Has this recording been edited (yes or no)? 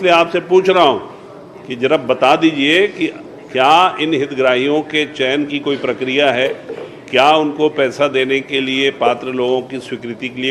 no